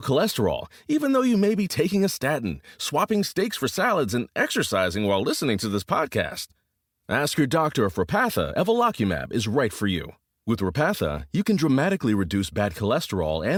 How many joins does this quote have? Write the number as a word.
zero